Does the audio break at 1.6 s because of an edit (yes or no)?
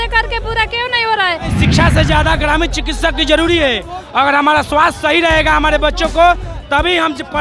yes